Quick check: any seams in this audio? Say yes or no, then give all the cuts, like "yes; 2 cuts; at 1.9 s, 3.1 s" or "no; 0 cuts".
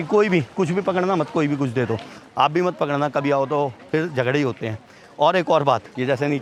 no; 0 cuts